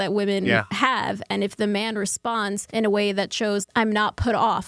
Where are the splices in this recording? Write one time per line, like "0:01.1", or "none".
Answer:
0:02.6
0:03.7